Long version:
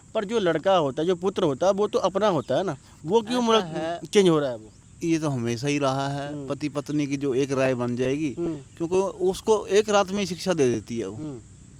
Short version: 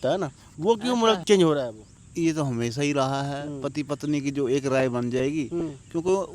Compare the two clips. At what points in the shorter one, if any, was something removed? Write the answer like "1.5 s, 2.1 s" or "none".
1.2 s